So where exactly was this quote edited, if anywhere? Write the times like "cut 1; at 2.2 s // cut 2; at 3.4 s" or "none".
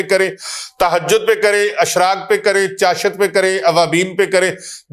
none